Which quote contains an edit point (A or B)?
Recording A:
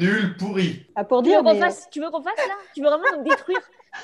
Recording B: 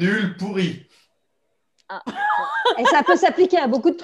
A